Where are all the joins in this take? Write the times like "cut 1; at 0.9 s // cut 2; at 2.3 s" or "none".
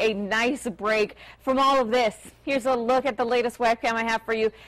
none